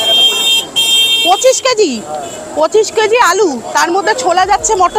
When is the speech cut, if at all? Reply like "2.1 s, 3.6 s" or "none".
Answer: none